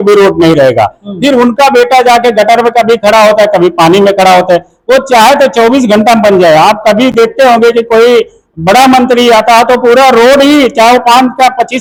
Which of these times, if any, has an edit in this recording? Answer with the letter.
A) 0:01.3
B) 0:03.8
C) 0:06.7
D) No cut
D